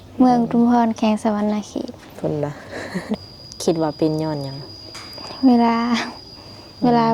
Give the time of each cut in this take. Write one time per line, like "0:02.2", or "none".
0:03.1